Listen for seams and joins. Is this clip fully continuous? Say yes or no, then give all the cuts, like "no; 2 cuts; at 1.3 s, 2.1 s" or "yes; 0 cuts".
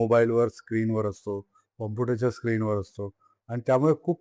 yes; 0 cuts